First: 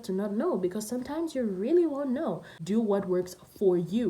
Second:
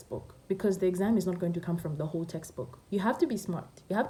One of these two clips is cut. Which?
first; 1 cut; at 2.5 s

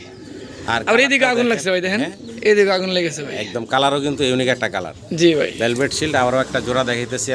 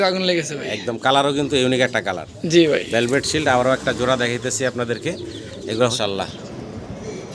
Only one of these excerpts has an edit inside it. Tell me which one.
second; 1 cut; at 5.9 s

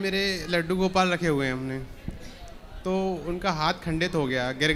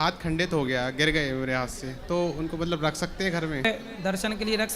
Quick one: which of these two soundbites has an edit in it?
second; 1 cut; at 3.6 s

